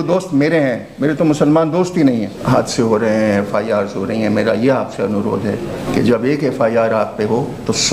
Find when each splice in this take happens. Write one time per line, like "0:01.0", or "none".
0:02.3
0:05.8